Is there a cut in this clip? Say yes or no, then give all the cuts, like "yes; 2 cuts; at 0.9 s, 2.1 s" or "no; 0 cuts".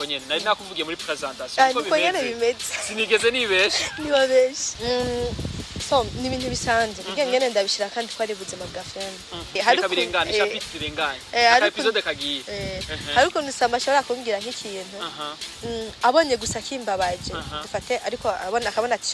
yes; 2 cuts; at 4.7 s, 9.6 s